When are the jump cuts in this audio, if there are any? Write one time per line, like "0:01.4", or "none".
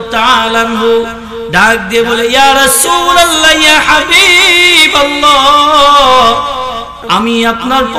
0:06.9